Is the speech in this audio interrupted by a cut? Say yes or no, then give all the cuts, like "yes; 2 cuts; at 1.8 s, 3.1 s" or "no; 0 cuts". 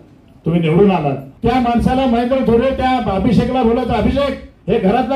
yes; 1 cut; at 1.2 s